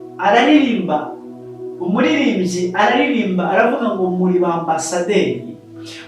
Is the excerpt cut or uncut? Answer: uncut